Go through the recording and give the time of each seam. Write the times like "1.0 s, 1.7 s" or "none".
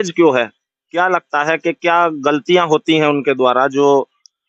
none

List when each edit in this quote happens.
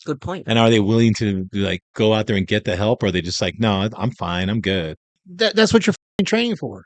5.2 s

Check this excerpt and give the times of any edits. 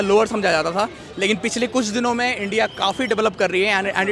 none

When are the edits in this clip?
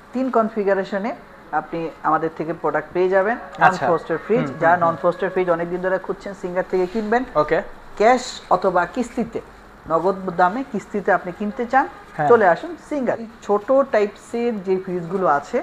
13.3 s

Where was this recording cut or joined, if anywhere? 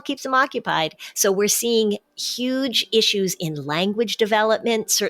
1.0 s

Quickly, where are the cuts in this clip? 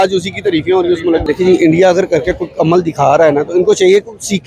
1.2 s

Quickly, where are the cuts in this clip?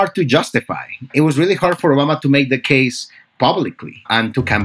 1.1 s

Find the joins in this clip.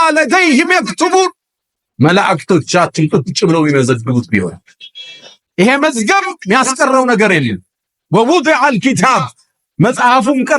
none

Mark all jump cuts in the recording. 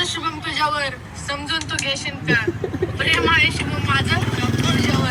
none

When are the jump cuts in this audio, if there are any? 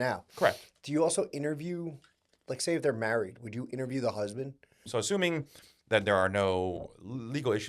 4.8 s

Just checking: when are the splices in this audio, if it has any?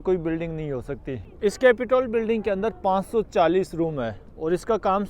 none

